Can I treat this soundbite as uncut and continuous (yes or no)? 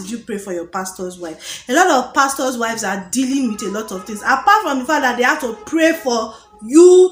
yes